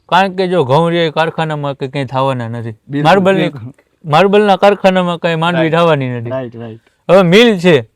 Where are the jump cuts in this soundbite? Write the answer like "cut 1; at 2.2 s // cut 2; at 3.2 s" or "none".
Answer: none